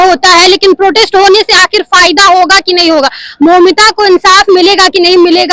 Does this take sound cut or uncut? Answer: uncut